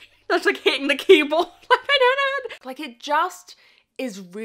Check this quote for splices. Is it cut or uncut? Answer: cut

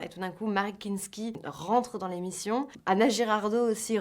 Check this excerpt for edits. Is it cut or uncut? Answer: cut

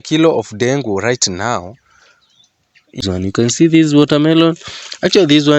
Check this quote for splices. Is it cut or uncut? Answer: cut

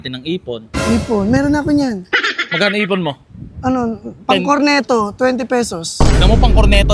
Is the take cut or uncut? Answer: uncut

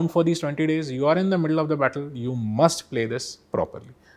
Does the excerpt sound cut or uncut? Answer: uncut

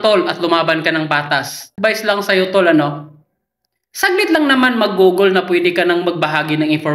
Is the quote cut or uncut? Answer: cut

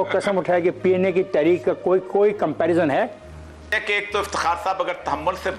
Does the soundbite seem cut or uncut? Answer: cut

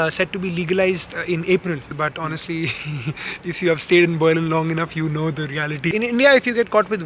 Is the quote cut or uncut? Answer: cut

